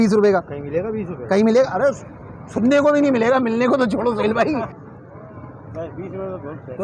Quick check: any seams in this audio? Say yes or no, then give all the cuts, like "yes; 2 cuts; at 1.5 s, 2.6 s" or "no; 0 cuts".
yes; 1 cut; at 4.8 s